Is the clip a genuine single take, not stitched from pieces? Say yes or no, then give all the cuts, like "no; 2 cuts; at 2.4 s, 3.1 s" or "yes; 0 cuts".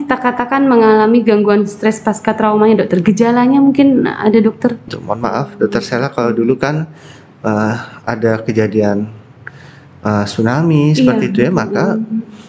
no; 1 cut; at 4.8 s